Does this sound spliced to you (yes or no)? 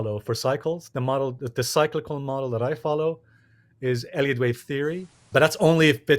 yes